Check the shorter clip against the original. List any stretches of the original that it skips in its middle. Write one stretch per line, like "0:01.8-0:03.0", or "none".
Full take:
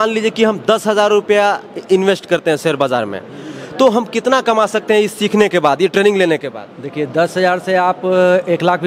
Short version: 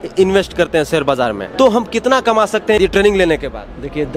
0:03.2-0:03.6
0:05.0-0:05.8